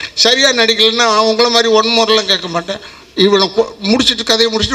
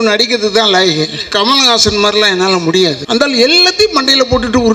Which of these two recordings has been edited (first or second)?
second